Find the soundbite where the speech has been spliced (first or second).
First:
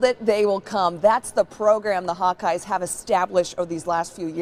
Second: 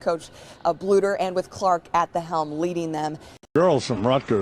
second